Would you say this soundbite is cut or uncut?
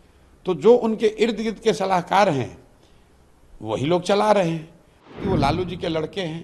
cut